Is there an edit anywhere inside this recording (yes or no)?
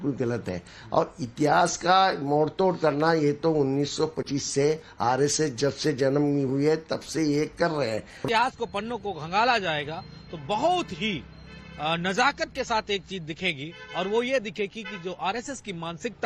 no